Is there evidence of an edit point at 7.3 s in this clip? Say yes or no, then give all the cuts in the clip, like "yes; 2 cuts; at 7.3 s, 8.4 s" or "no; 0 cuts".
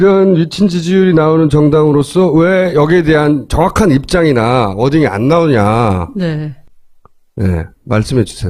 no; 0 cuts